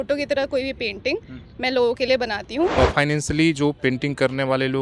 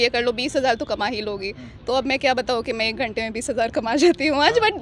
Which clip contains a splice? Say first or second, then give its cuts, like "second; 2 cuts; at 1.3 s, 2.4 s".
first; 1 cut; at 2.8 s